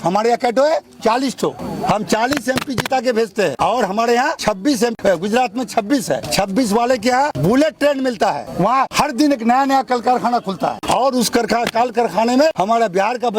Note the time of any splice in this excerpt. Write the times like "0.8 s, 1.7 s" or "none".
1.6 s, 3.5 s, 4.8 s, 6.2 s, 7.3 s, 8.8 s, 10.8 s, 12.5 s